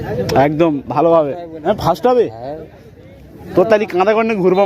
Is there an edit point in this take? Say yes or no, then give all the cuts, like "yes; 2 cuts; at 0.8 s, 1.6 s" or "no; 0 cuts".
yes; 1 cut; at 1.5 s